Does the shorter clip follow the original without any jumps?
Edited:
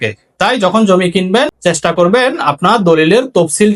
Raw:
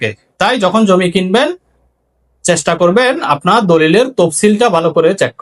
no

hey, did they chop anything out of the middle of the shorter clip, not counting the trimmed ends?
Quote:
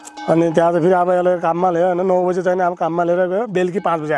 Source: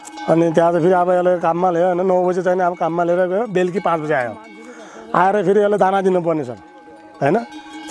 no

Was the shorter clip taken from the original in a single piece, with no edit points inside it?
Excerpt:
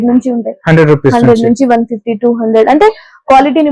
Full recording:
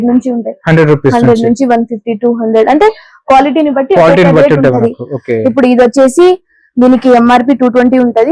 yes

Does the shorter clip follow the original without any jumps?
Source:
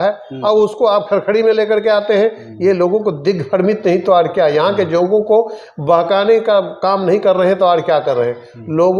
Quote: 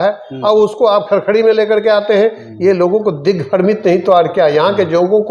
yes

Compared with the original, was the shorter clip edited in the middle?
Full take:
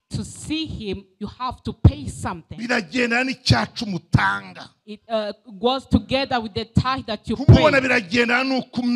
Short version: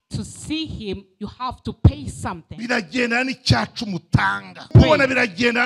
yes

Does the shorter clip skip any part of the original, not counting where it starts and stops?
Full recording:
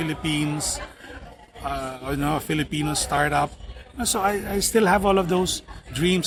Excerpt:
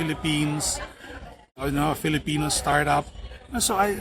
yes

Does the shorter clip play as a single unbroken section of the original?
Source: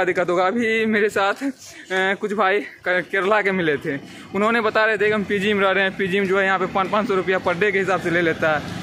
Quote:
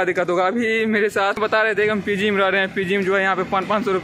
no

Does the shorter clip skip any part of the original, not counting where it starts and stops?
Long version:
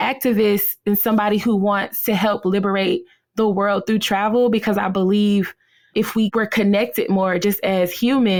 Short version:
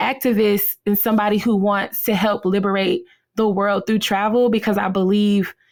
no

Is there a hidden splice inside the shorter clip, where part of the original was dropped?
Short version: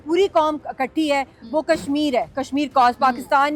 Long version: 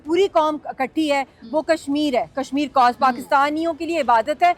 no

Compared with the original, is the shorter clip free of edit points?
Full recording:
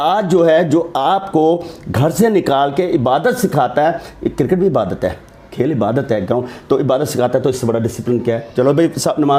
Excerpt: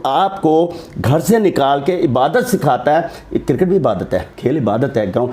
no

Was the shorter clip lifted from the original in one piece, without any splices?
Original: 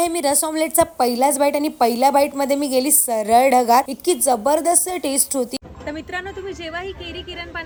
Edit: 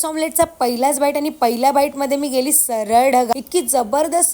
no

